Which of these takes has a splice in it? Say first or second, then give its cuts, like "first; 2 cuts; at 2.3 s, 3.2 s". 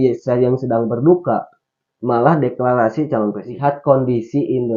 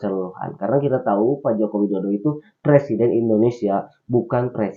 first; 1 cut; at 3.5 s